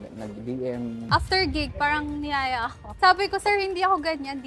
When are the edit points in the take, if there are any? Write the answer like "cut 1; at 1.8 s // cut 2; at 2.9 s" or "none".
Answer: cut 1; at 1.0 s // cut 2; at 2.9 s